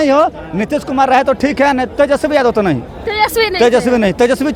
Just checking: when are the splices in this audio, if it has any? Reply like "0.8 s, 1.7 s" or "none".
none